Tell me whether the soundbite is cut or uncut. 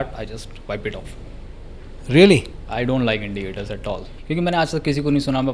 cut